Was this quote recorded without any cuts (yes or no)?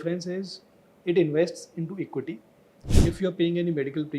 no